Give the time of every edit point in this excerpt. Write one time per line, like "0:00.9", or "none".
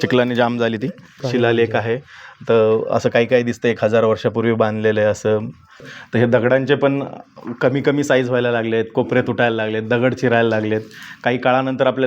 0:01.2
0:05.9

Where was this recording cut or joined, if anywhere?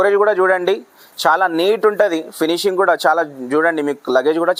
none

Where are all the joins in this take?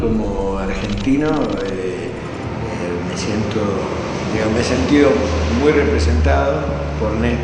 0:02.5

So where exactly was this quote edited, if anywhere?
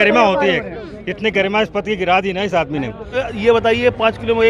0:03.2

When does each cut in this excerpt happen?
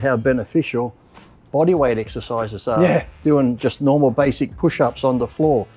none

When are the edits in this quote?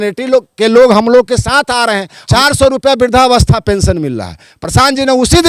0:02.2

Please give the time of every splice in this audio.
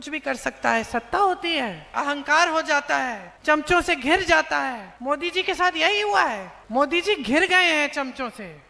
0:01.9
0:03.3
0:04.9
0:06.5

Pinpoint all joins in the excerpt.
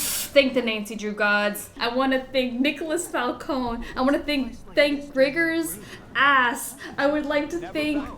0:01.7

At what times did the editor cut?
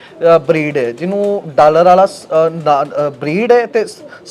none

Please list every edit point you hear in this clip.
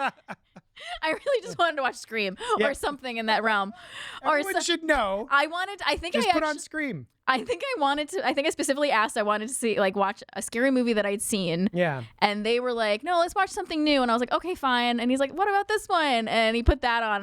none

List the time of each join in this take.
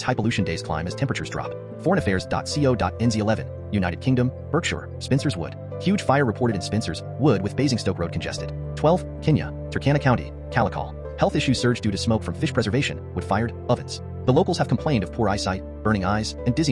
none

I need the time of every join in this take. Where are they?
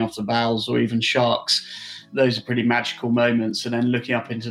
0:02.0

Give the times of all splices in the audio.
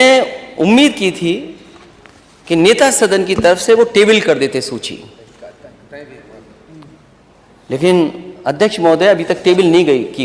none

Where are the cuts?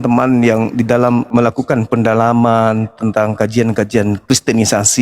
0:01.3
0:04.2

